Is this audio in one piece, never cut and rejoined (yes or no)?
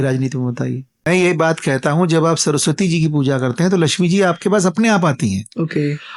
no